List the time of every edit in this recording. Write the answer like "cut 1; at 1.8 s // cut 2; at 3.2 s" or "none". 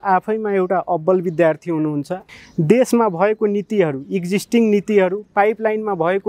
cut 1; at 2.2 s